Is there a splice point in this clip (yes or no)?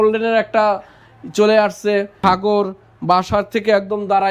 yes